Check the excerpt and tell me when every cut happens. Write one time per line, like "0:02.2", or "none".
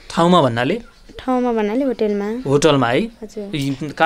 none